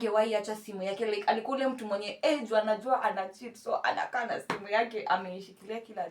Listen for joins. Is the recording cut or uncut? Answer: uncut